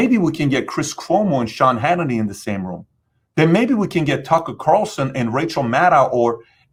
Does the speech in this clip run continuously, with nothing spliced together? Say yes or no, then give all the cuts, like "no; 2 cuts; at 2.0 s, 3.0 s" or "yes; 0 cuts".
yes; 0 cuts